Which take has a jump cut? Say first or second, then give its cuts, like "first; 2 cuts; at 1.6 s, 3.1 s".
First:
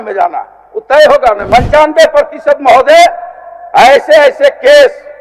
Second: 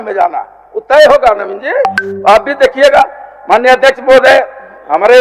first; 1 cut; at 1.4 s